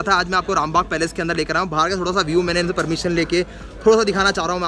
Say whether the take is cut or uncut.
uncut